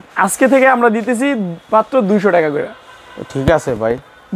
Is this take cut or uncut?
uncut